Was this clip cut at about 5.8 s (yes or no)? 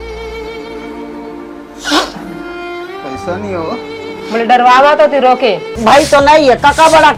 yes